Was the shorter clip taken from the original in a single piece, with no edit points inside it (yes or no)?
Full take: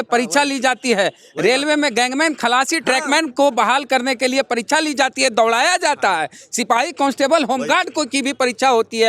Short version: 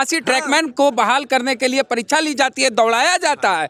yes